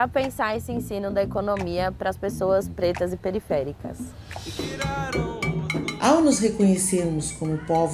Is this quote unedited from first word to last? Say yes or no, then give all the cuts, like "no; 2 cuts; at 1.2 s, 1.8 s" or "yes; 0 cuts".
no; 2 cuts; at 4.6 s, 5.9 s